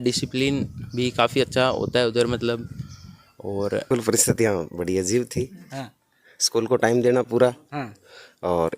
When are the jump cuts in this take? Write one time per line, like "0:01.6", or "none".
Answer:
0:03.8